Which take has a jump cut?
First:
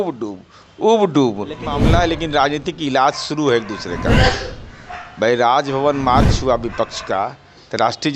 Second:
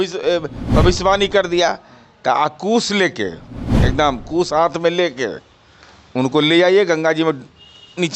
first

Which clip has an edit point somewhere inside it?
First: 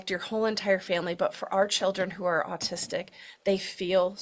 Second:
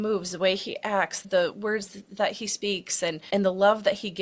second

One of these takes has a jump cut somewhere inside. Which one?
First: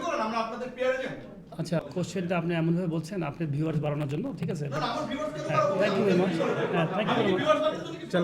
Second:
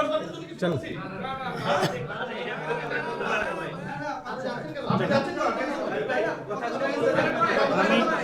first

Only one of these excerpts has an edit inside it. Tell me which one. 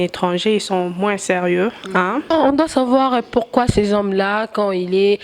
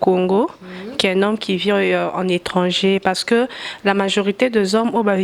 first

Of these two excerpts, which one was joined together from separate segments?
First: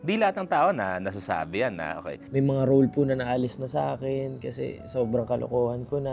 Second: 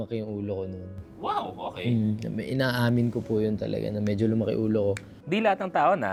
first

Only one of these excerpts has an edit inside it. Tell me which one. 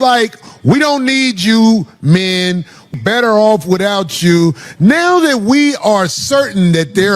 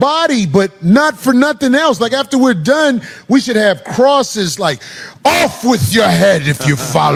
first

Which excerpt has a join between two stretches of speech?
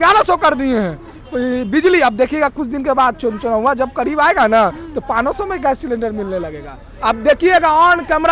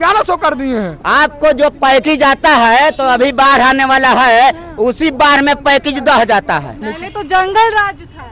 second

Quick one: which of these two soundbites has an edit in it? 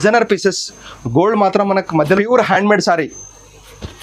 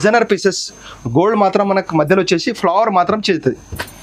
first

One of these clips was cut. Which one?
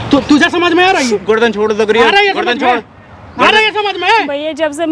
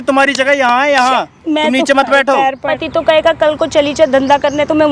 second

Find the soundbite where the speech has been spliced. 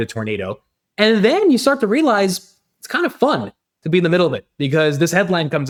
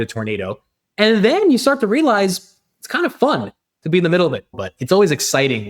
second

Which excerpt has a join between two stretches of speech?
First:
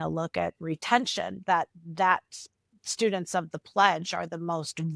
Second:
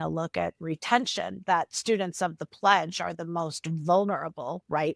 second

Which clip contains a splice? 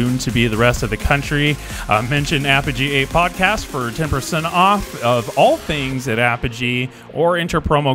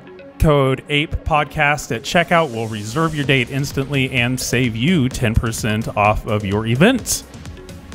second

